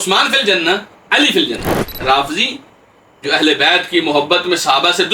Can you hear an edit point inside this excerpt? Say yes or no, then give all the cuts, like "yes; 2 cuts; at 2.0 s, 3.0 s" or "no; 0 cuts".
yes; 1 cut; at 1.9 s